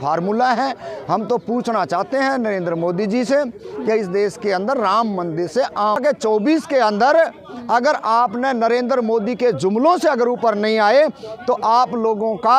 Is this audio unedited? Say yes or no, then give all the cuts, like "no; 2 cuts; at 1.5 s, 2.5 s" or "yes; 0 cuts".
no; 1 cut; at 6.0 s